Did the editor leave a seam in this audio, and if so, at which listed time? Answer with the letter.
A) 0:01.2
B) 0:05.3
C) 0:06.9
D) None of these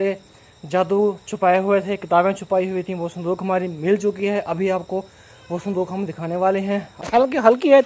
C